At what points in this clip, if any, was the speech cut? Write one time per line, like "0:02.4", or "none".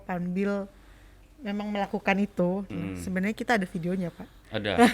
none